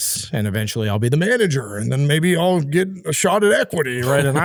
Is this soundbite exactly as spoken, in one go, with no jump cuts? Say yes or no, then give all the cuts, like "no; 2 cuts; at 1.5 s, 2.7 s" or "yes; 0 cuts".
yes; 0 cuts